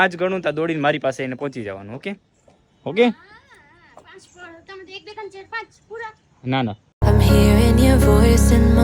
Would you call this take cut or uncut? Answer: cut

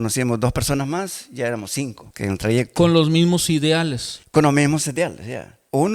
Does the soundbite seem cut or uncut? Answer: cut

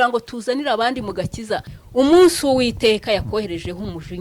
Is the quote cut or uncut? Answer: cut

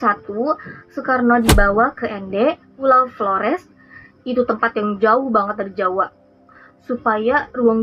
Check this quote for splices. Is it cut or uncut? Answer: uncut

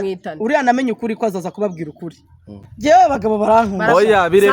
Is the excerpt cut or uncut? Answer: cut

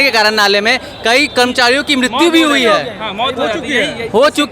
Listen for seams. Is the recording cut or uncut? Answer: uncut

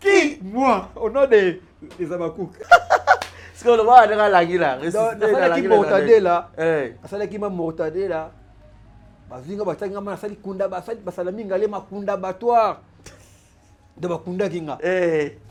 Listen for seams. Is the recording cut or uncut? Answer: uncut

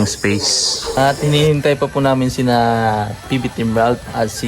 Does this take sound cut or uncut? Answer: cut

